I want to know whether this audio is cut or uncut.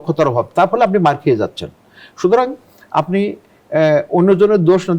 uncut